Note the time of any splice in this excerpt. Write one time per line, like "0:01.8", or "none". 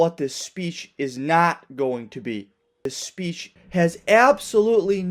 none